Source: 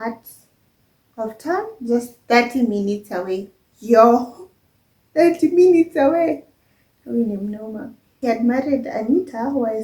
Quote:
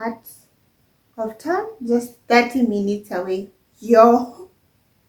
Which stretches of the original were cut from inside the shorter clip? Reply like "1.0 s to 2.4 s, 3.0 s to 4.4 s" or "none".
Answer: none